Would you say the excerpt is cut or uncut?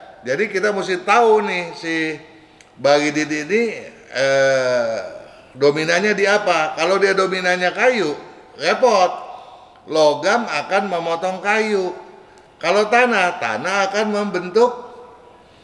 uncut